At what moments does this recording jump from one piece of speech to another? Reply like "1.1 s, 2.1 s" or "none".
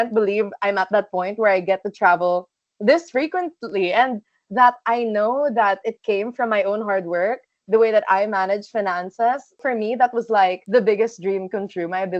9.6 s